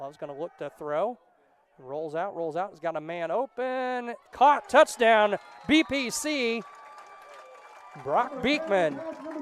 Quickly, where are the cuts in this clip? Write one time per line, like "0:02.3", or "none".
none